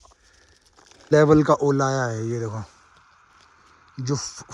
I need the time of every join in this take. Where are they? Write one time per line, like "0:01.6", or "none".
0:01.1